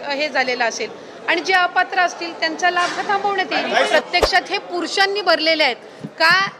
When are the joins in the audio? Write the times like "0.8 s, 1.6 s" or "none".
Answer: 3.9 s